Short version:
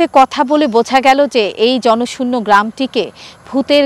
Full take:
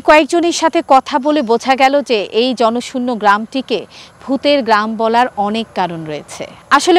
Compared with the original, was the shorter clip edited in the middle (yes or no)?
no